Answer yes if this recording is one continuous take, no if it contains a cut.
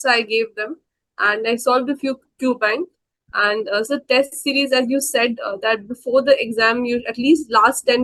yes